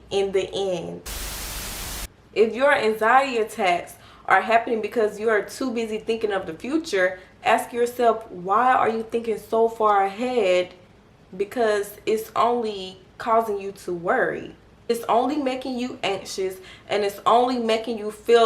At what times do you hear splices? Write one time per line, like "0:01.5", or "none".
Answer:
0:01.6